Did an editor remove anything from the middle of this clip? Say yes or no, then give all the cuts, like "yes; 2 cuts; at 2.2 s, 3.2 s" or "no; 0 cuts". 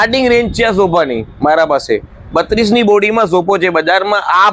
no; 0 cuts